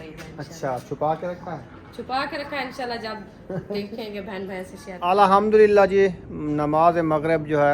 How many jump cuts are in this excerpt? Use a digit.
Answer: 1